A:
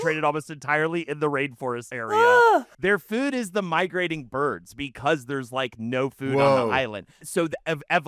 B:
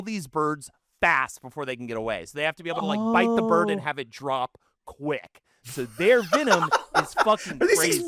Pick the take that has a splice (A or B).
A